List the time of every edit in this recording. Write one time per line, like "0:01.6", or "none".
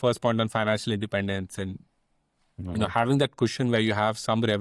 none